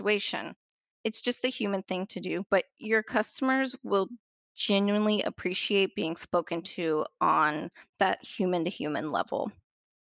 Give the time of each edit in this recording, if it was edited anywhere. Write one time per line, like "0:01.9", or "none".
0:00.9